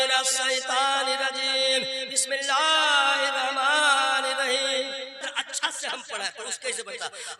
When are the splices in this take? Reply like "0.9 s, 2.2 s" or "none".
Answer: 5.2 s